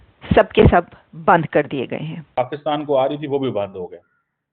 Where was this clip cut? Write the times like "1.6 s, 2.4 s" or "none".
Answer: 2.4 s

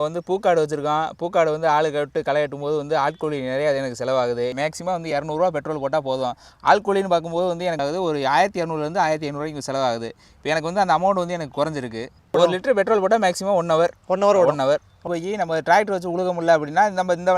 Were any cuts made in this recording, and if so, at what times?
4.5 s, 7.8 s, 12.3 s, 15.0 s

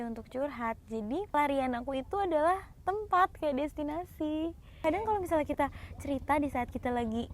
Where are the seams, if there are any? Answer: 1.3 s, 4.7 s

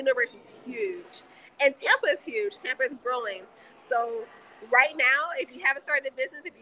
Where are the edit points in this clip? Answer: none

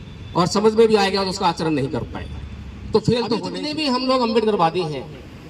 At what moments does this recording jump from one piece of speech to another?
3.6 s

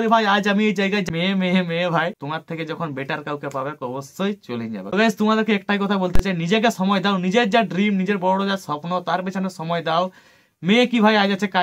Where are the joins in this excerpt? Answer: 1.1 s, 2.1 s, 4.8 s

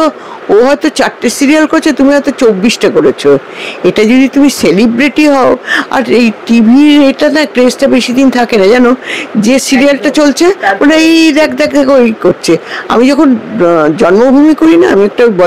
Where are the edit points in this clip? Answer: none

